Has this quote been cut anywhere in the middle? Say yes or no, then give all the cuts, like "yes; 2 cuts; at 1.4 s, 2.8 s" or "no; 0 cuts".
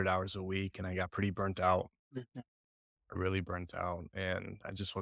no; 0 cuts